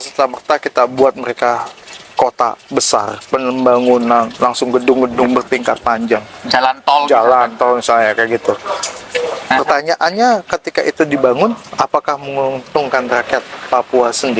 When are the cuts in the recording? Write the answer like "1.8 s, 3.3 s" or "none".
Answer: none